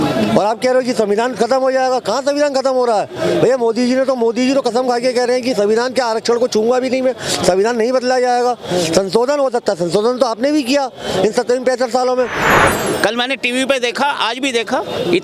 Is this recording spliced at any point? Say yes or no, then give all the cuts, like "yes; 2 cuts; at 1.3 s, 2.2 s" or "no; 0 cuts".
yes; 1 cut; at 12.5 s